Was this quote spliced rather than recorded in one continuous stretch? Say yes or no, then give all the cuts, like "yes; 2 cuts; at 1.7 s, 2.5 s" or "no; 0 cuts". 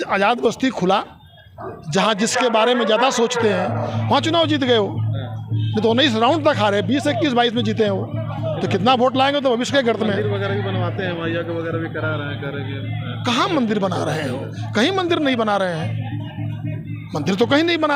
no; 0 cuts